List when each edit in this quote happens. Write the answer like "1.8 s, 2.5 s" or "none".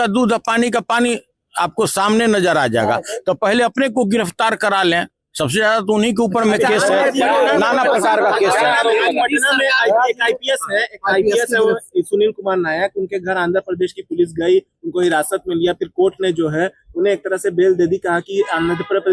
none